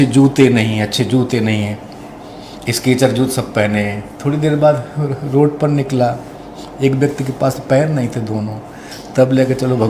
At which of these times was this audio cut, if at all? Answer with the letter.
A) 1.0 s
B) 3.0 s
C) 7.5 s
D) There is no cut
D